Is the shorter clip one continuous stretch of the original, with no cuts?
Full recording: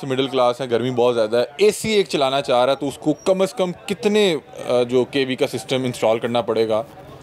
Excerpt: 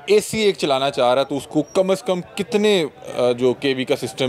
yes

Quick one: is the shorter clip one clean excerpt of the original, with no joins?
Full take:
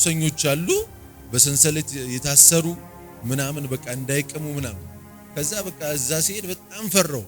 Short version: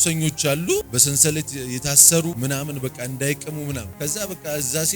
no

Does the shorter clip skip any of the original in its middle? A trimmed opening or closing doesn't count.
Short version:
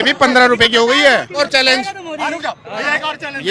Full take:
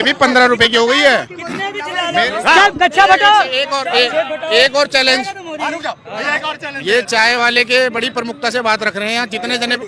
yes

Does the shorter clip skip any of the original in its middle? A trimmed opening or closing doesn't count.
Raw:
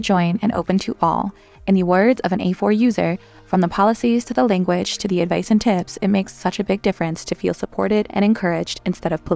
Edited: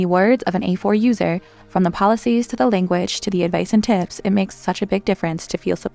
no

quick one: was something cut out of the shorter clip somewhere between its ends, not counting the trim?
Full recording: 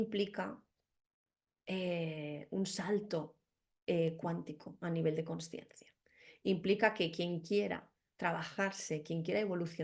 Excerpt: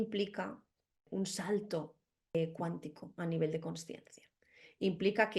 yes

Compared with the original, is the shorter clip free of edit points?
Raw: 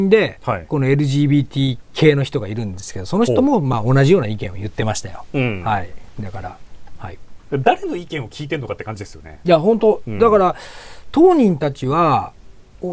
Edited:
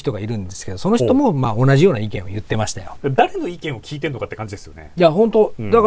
no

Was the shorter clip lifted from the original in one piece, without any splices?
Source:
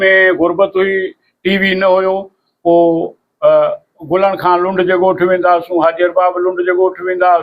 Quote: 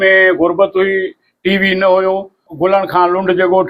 no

